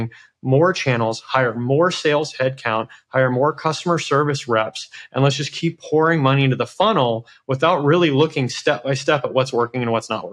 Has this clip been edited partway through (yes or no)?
no